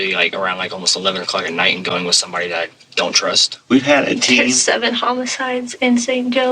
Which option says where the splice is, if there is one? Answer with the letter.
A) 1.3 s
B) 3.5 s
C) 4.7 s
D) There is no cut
B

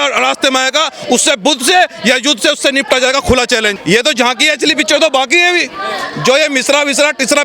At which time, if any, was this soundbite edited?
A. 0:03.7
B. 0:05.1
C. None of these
A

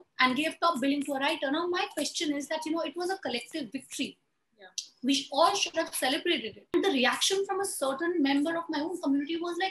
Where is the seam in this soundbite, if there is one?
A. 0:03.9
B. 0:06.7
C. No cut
B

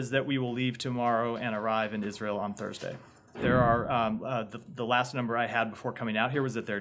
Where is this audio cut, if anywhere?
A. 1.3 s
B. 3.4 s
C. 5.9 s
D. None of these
B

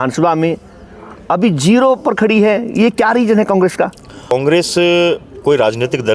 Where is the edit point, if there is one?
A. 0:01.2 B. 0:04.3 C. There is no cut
B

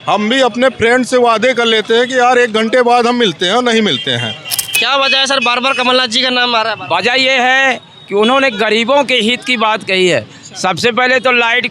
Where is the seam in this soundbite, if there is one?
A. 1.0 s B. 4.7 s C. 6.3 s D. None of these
B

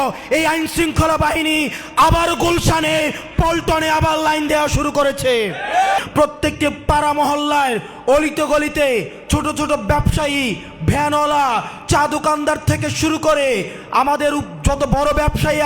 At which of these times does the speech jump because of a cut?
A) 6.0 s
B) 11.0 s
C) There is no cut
A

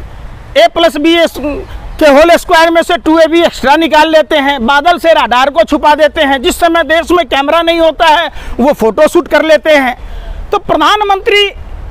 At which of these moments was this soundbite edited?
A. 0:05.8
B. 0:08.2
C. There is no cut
C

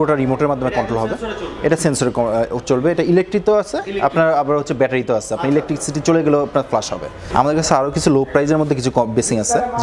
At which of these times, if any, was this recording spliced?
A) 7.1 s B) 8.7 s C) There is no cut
A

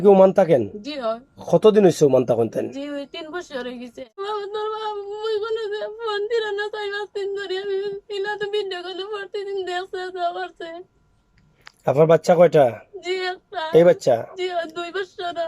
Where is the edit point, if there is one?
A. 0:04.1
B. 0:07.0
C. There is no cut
A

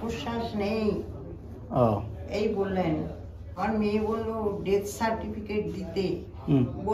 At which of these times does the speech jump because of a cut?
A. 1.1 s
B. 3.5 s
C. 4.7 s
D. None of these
B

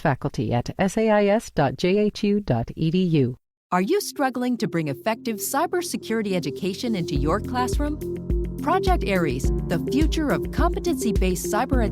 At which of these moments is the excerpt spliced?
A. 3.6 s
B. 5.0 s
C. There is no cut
A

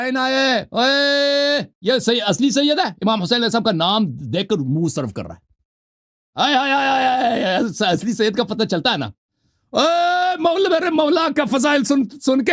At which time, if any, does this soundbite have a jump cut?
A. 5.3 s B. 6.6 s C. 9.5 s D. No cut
D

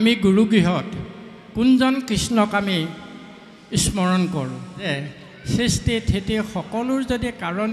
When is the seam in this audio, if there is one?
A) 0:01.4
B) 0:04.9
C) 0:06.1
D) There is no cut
B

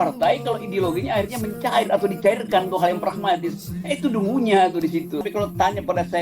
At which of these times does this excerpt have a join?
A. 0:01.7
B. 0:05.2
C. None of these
B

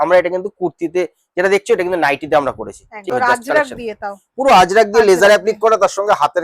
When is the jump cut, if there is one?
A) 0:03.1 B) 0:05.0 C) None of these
A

